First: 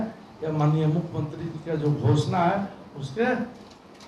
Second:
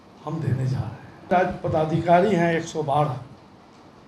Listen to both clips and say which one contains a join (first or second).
second